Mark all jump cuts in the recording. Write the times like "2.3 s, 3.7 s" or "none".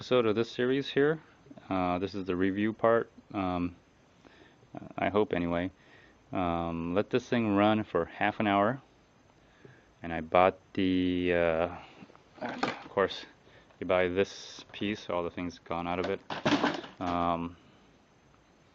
10.4 s